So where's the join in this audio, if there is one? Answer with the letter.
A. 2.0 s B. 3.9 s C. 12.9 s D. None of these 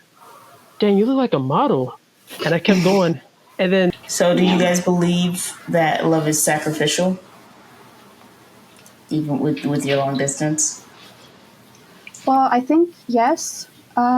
B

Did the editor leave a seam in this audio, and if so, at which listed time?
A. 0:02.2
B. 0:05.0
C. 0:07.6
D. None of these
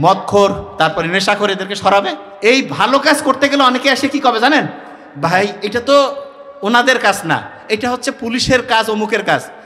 A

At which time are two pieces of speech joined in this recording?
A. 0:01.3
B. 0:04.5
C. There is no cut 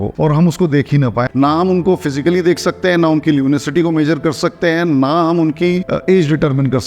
A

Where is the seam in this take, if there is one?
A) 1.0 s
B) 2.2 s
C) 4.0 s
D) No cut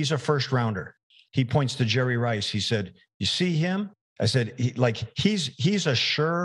C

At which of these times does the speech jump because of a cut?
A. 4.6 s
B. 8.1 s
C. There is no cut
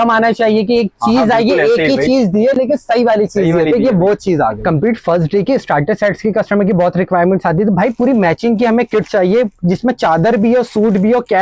A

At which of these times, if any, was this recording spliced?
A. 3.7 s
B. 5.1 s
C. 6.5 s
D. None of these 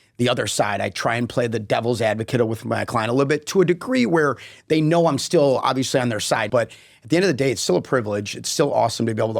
C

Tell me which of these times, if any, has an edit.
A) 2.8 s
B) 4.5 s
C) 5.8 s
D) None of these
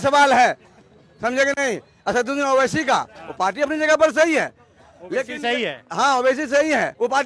D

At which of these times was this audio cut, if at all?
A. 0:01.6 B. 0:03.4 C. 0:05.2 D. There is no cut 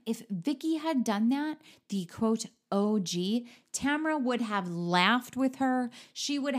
D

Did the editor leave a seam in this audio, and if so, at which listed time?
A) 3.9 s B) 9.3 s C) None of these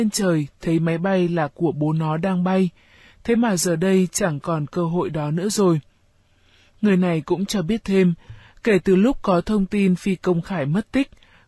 B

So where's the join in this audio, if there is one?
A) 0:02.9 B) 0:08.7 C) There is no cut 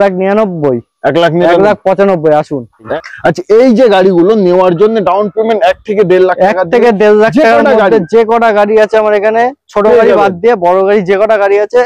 A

